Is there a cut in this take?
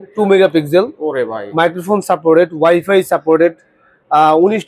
no; 0 cuts

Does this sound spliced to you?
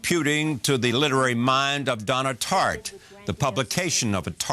no; 0 cuts

